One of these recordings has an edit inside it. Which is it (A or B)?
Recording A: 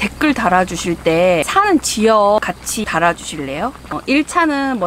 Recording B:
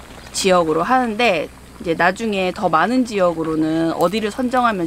A